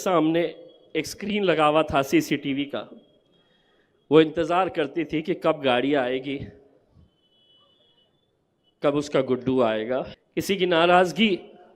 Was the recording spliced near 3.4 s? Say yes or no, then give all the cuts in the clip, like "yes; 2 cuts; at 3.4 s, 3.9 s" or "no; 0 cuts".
no; 1 cut; at 10.2 s